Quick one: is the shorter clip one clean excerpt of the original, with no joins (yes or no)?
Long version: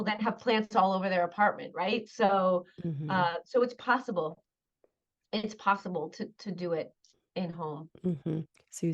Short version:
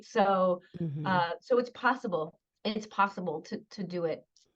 no